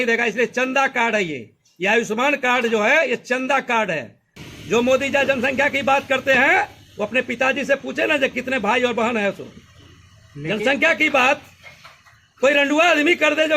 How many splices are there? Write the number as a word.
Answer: one